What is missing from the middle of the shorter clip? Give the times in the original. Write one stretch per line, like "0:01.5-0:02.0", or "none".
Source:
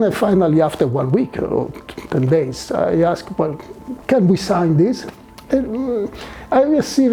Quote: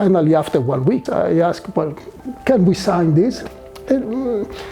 0:01.3-0:02.7